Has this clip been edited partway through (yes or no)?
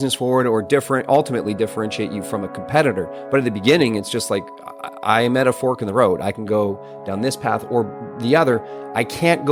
no